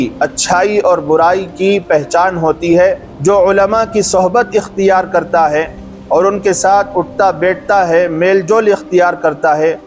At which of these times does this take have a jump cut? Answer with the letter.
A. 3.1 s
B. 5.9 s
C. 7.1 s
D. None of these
A